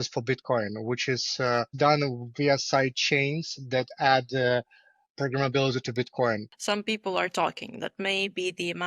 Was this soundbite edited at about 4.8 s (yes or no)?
no